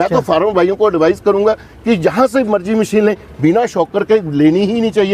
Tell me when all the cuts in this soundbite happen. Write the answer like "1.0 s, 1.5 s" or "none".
none